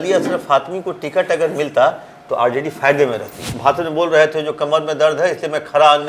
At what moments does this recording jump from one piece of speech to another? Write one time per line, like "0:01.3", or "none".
0:03.5